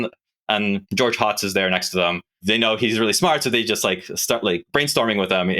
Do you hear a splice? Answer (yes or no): yes